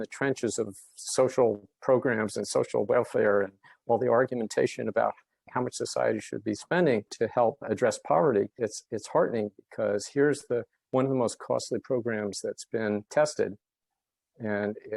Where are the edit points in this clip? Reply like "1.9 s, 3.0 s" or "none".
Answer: 5.5 s